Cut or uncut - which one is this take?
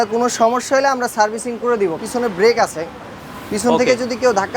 cut